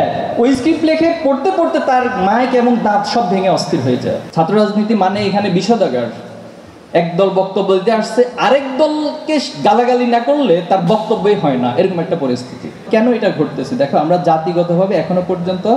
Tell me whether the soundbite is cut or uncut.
cut